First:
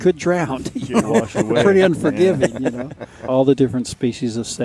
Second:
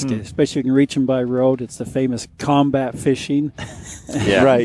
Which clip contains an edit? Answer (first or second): first